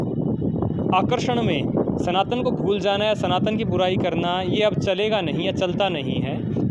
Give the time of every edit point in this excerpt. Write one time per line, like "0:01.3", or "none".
none